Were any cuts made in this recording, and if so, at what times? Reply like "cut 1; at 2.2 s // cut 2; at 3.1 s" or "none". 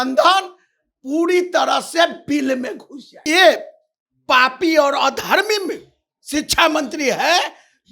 cut 1; at 3.2 s